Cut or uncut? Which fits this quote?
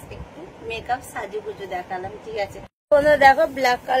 cut